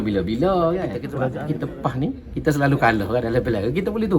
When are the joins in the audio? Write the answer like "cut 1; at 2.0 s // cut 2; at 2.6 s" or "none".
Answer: cut 1; at 1.4 s